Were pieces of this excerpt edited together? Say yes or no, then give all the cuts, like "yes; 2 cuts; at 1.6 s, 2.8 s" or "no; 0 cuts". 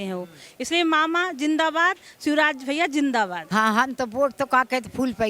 yes; 1 cut; at 3.5 s